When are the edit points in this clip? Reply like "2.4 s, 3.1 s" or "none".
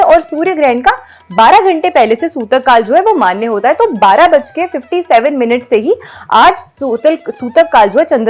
none